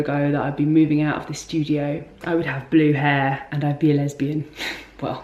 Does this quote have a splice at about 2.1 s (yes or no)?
yes